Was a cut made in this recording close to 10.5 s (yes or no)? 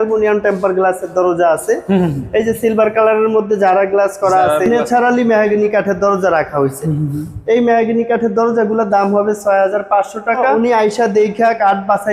yes